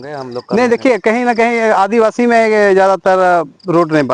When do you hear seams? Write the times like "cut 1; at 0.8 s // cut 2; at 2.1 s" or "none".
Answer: none